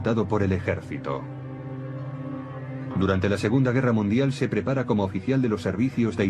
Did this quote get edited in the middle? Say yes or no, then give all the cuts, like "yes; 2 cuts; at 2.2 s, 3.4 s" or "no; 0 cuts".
yes; 1 cut; at 1.7 s